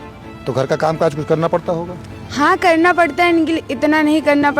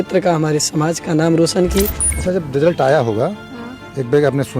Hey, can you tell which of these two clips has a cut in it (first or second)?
second